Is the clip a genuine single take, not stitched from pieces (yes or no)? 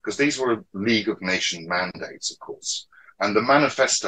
yes